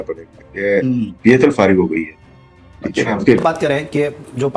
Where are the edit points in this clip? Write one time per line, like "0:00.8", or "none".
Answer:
0:03.4